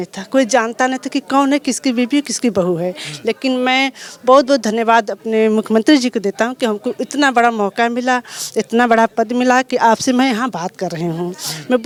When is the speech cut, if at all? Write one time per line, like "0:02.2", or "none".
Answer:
none